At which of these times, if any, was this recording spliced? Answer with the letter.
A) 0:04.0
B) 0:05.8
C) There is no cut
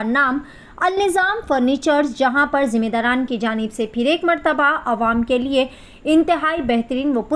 C